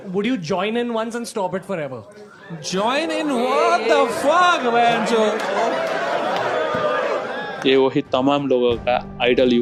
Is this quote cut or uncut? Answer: uncut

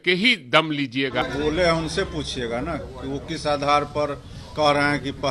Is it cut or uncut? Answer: cut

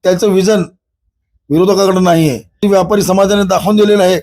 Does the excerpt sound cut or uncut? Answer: cut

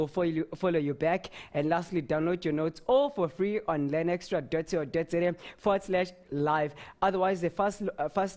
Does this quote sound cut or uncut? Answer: cut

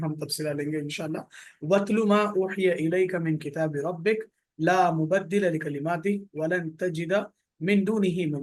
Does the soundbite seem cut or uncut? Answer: uncut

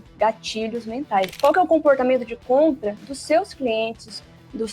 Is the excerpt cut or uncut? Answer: cut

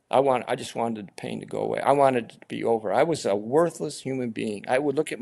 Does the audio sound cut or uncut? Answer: uncut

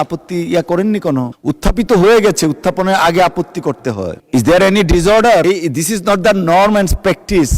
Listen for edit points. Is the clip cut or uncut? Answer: cut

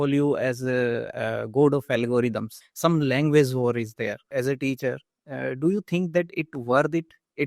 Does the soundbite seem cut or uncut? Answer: cut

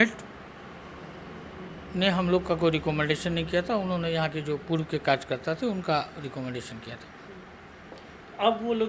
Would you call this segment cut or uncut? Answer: uncut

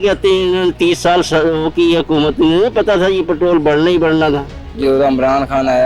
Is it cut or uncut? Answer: cut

